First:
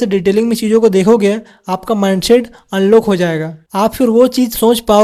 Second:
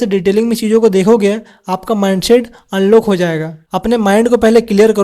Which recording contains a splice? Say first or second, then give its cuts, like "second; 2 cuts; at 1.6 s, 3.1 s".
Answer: second; 1 cut; at 3.6 s